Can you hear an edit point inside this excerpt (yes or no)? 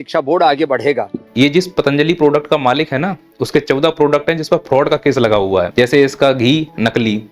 yes